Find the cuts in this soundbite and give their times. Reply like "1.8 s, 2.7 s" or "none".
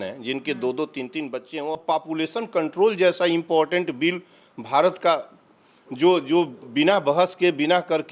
1.7 s